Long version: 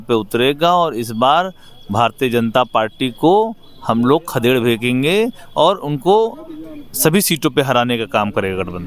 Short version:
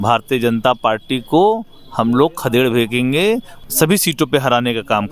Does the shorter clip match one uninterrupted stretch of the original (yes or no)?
no